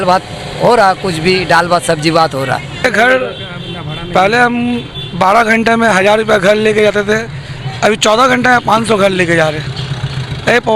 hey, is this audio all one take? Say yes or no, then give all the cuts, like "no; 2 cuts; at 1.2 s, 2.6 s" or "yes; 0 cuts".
no; 1 cut; at 2.8 s